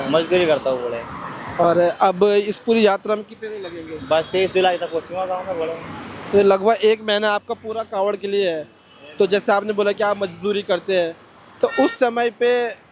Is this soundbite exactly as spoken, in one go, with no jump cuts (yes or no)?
yes